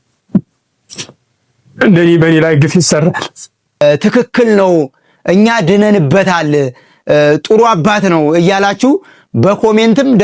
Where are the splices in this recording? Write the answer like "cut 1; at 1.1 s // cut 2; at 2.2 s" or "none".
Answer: cut 1; at 3.8 s